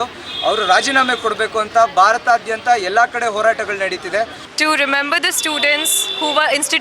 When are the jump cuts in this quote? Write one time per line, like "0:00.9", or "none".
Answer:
0:04.4